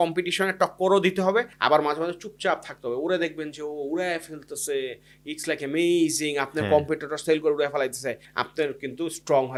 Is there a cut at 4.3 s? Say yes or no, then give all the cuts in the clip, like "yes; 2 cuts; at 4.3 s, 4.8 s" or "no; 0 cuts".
no; 0 cuts